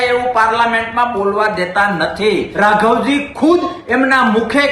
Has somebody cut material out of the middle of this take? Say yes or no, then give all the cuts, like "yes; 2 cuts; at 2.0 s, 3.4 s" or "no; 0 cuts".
yes; 1 cut; at 2.5 s